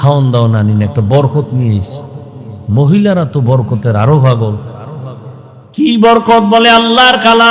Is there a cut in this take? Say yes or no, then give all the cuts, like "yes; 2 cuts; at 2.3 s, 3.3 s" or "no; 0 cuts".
yes; 1 cut; at 5.8 s